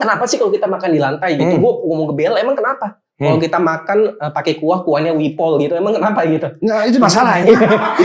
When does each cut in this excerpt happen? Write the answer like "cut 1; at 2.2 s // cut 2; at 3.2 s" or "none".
none